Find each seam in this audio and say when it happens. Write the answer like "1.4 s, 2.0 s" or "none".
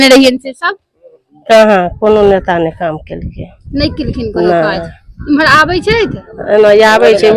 none